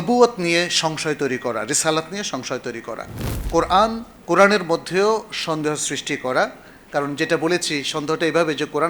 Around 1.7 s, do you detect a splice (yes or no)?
no